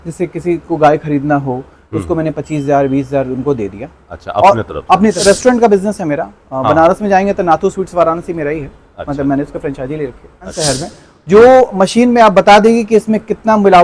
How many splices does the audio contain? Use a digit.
2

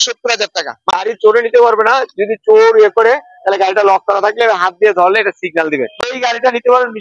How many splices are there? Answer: 2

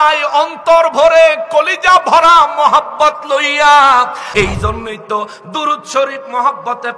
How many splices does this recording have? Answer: 1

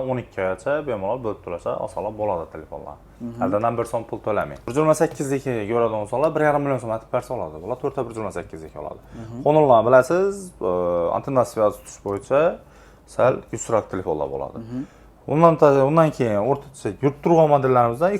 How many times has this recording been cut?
1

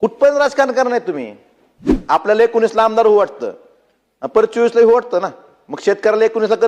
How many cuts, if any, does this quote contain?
1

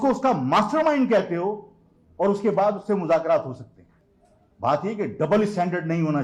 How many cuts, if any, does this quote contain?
0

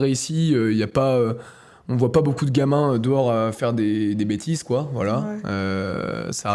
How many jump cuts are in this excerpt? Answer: 0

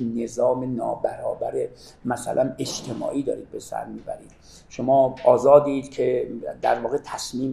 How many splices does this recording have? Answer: 0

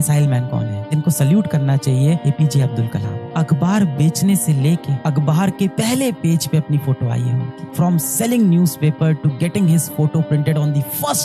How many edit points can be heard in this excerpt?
1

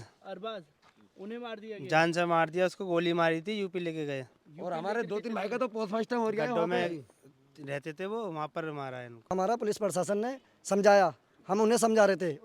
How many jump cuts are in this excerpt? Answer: 1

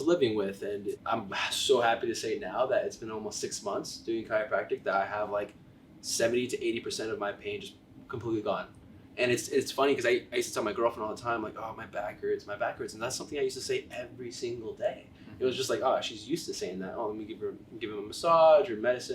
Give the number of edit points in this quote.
1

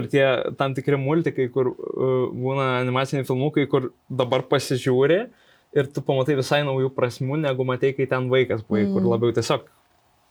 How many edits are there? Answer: 0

